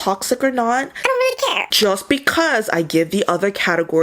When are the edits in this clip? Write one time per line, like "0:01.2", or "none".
0:01.6